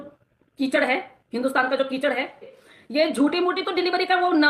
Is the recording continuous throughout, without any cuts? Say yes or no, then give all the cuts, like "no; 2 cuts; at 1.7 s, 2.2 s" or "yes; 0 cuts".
no; 1 cut; at 2.6 s